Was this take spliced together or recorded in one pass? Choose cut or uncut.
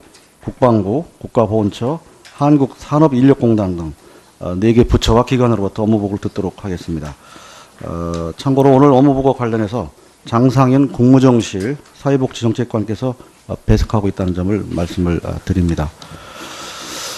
cut